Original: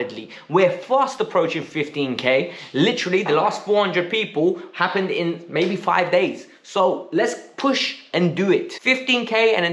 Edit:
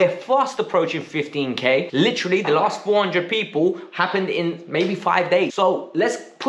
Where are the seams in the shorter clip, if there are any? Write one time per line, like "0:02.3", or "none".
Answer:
0:01.9
0:05.5